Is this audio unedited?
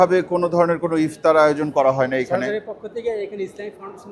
yes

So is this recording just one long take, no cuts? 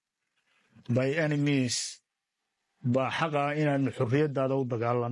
yes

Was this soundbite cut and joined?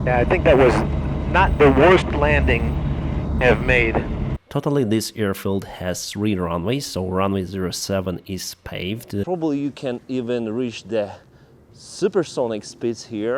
yes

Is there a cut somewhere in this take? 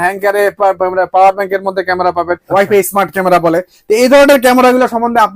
yes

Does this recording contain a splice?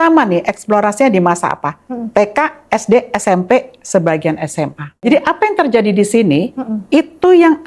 yes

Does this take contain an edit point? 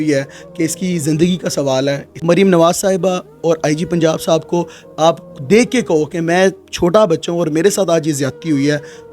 yes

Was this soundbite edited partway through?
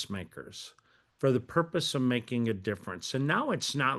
no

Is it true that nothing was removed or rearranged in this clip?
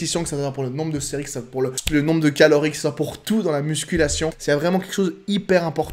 no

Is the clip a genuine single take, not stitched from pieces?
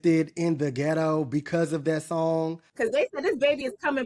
no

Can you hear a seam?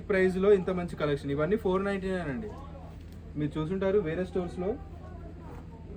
no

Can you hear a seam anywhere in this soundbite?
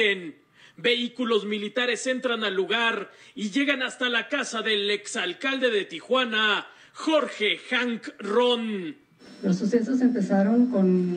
no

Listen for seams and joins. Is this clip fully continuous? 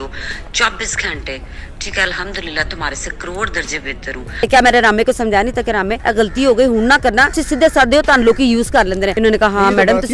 no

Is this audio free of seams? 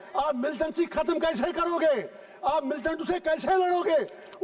yes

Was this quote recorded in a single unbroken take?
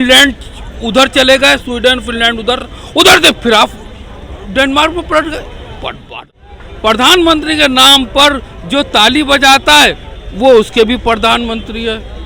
no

